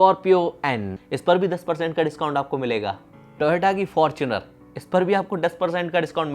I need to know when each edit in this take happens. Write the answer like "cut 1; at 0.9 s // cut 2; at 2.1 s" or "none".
cut 1; at 0.9 s